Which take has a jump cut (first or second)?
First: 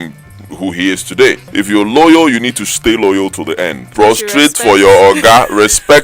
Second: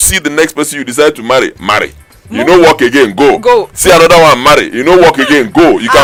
first